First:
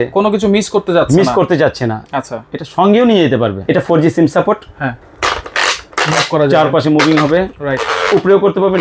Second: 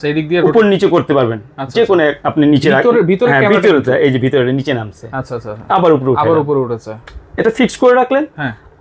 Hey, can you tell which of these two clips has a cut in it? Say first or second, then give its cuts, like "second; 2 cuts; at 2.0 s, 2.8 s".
first; 2 cuts; at 3.6 s, 5.1 s